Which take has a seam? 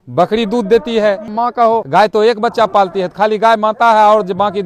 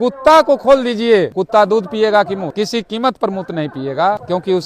second; 1 cut; at 2.5 s

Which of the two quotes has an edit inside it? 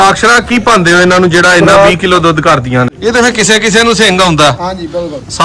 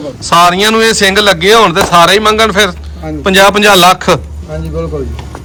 first; 1 cut; at 2.9 s

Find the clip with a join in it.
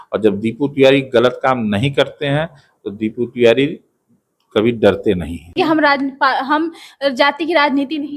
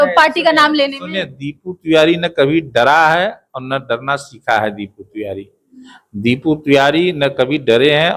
first; 1 cut; at 5.3 s

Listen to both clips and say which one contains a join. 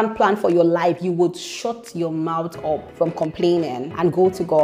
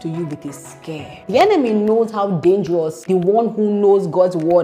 second; 2 cuts; at 1.1 s, 3.0 s

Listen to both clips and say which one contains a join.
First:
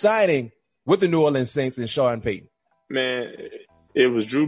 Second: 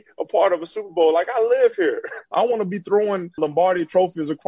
second; 2 cuts; at 2.3 s, 3.4 s

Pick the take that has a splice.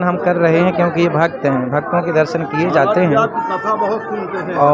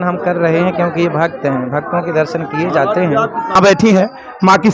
second; 1 cut; at 3.6 s

